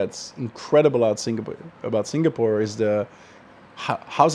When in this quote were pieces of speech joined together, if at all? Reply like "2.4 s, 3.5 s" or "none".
none

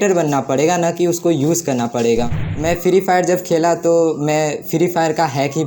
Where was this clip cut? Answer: 2.5 s

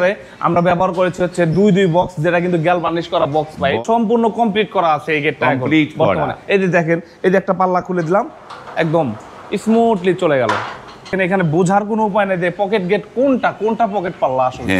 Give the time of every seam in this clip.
3.8 s, 11.1 s

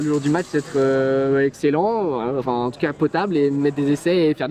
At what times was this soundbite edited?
none

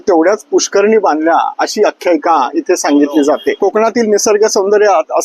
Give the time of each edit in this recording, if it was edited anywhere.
3.6 s

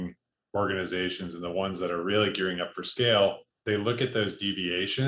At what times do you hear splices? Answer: 3.5 s

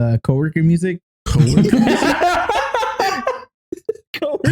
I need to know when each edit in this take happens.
1.1 s

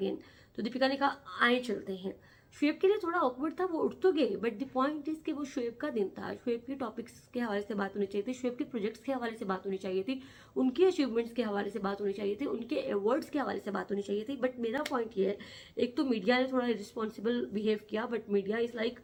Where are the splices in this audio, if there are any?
none

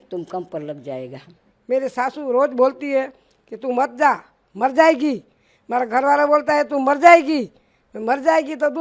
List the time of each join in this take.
1.5 s

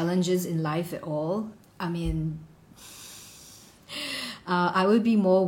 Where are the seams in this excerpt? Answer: 1.6 s

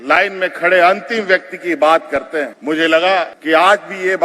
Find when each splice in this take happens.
2.6 s, 3.4 s

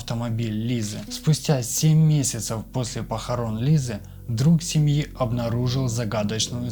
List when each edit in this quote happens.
1.1 s

